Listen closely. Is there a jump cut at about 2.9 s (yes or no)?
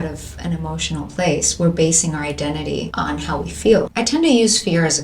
yes